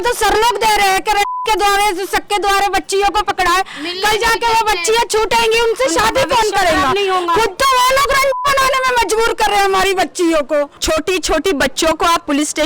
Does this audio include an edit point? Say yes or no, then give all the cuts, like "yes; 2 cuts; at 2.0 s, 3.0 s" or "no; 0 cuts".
yes; 1 cut; at 10.8 s